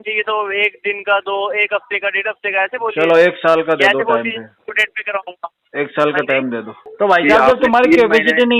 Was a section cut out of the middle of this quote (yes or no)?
yes